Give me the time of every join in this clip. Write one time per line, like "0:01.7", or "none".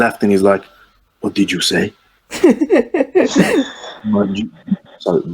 none